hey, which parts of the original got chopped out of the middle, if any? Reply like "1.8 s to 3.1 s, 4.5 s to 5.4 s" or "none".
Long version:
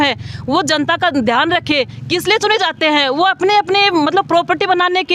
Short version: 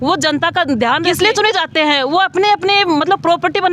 1.5 s to 2.1 s

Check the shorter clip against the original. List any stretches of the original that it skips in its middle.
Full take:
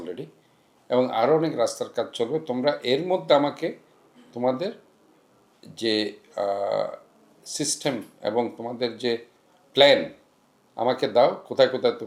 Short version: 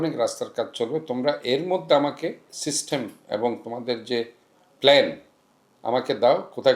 3.9 s to 7.4 s

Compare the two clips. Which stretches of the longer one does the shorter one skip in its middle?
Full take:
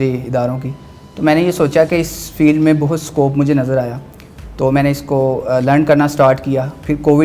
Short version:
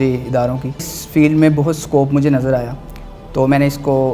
1.0 s to 2.2 s

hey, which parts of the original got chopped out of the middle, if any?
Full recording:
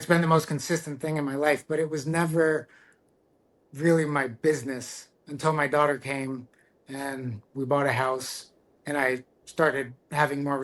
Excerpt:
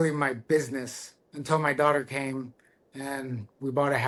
none

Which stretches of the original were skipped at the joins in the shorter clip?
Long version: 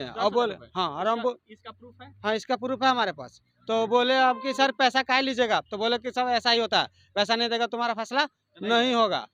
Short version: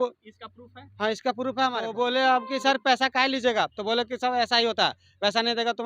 3.2 s to 3.9 s

